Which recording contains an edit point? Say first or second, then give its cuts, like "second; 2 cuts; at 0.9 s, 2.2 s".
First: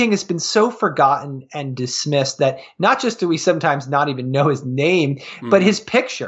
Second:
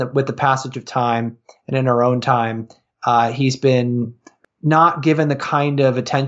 second; 1 cut; at 4.2 s